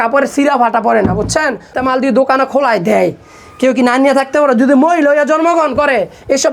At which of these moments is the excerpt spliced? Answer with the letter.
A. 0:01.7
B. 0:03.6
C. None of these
A